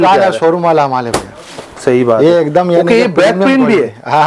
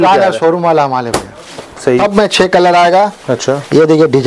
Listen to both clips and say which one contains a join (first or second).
second